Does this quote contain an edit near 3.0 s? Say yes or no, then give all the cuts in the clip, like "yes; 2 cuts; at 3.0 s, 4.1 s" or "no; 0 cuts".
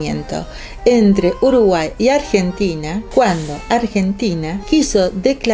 yes; 2 cuts; at 3.0 s, 4.5 s